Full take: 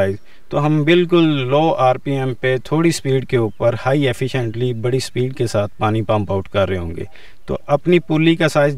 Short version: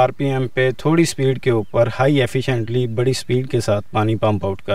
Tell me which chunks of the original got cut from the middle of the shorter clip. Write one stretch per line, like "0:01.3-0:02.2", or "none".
none